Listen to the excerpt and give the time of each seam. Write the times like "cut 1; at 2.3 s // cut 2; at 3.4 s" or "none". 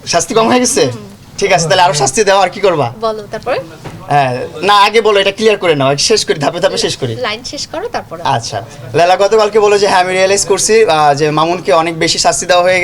none